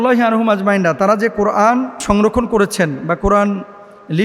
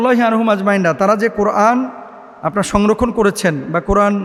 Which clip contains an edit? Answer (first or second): first